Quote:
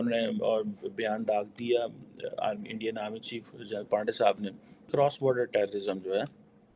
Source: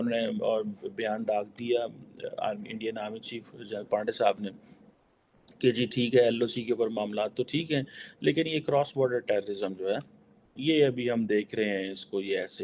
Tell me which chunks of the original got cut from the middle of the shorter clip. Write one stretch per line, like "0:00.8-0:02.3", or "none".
0:04.9-0:08.6